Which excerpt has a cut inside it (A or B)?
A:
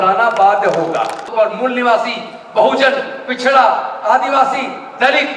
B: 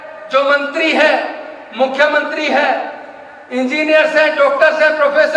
A